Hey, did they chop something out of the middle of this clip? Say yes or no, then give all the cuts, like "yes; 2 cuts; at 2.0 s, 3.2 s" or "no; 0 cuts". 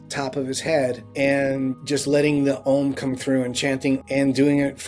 yes; 3 cuts; at 1.0 s, 1.8 s, 4.0 s